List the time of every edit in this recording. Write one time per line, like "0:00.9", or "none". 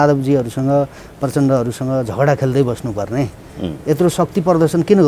none